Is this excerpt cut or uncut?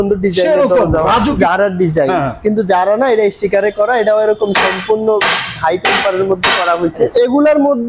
cut